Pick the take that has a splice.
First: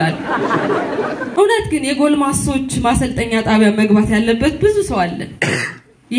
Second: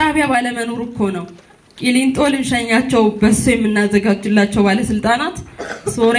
first; 1 cut; at 1.2 s

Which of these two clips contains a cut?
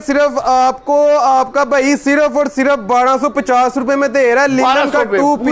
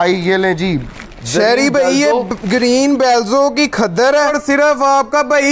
second; 1 cut; at 4.4 s

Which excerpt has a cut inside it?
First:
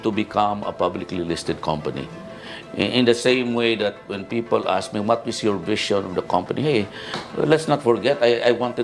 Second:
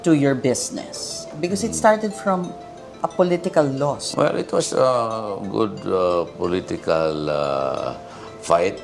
second; 1 cut; at 4.0 s

